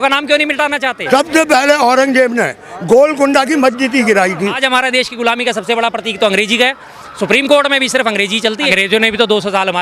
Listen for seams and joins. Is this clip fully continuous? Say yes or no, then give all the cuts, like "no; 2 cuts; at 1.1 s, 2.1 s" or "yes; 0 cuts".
no; 3 cuts; at 1.0 s, 4.6 s, 8.7 s